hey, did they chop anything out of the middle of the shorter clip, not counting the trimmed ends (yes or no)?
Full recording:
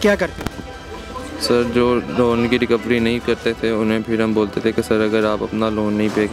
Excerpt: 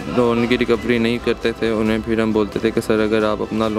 no